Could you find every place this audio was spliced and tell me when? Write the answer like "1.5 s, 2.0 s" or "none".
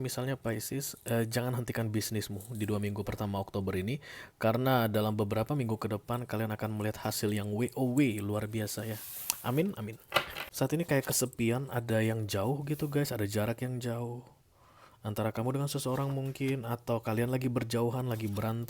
10.4 s